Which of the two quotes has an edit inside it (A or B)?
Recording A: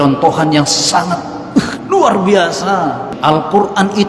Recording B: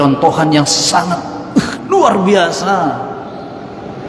A